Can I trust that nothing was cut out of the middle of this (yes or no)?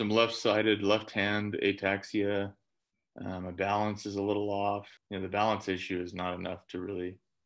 no